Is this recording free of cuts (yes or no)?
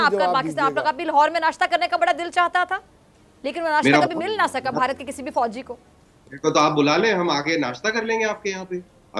yes